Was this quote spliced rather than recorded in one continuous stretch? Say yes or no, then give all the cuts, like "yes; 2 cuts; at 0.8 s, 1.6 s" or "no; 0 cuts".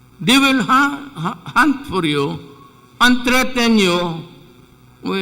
yes; 1 cut; at 1.2 s